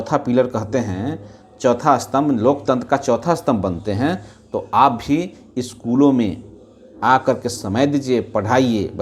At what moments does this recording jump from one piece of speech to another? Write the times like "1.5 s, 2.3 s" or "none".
none

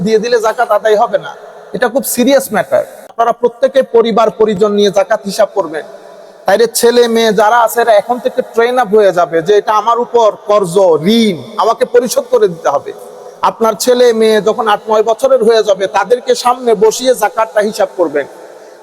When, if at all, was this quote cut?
3.1 s

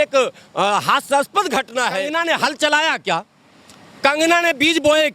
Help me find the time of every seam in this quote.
2.1 s

